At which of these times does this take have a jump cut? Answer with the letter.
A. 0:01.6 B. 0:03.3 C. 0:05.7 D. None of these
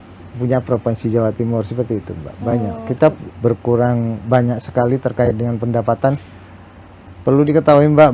B